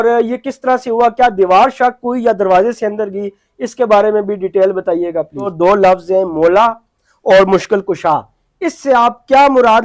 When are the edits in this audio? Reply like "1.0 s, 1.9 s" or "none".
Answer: 5.5 s